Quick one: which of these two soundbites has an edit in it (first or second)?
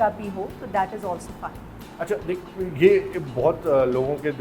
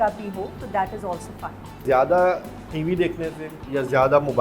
second